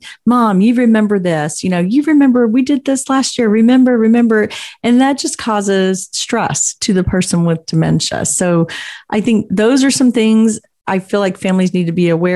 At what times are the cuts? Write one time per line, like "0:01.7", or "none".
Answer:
none

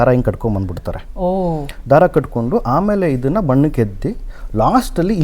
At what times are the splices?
none

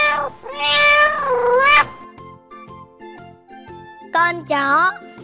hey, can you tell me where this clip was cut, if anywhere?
none

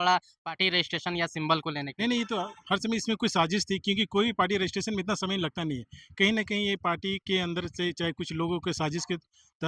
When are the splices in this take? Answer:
none

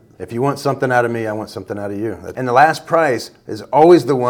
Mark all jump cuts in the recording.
0:02.2

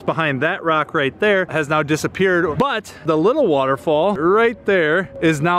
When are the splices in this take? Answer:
0:02.5
0:04.2

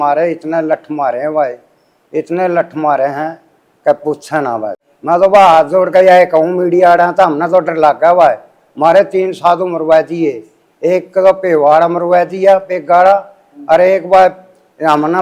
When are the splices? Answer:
0:04.9

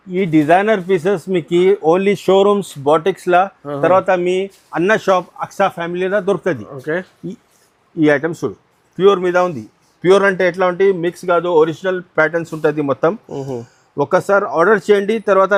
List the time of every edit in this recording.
none

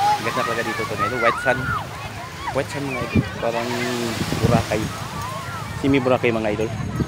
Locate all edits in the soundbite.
none

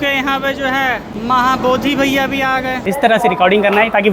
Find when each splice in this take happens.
0:01.1
0:02.8

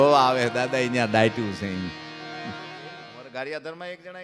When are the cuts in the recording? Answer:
0:03.0

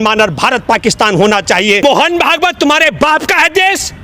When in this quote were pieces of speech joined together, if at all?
0:01.8

